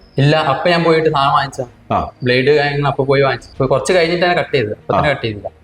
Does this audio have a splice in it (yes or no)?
yes